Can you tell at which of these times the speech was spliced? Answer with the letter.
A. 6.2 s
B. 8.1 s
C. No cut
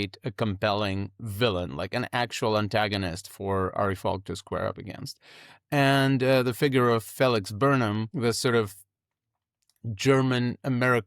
B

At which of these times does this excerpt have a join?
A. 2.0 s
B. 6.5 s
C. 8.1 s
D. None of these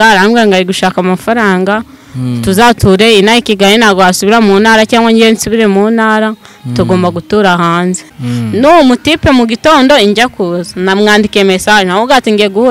C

